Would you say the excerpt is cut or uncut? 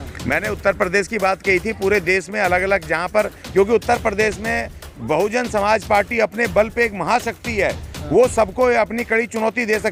uncut